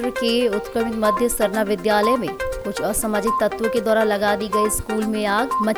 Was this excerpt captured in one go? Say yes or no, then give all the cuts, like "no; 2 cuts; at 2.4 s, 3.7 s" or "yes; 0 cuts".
yes; 0 cuts